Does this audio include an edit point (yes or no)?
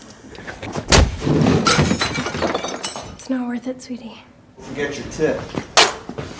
yes